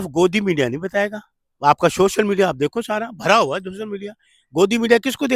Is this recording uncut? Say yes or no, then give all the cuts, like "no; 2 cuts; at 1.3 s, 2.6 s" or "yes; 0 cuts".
yes; 0 cuts